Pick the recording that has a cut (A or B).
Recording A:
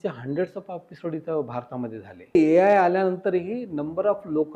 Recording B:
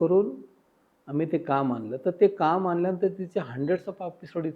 A